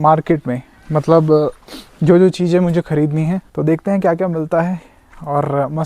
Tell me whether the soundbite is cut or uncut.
cut